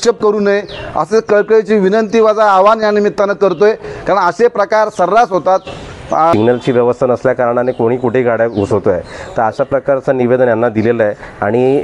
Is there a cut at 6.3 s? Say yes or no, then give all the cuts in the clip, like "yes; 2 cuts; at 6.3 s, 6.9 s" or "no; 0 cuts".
yes; 1 cut; at 6.3 s